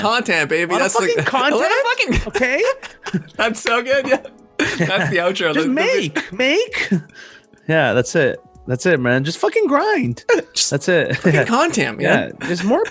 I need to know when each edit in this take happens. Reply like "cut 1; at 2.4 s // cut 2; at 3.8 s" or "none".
none